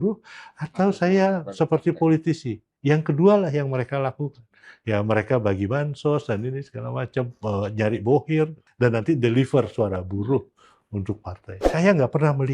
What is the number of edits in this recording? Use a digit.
2